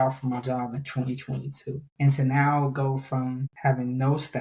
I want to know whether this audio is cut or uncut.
cut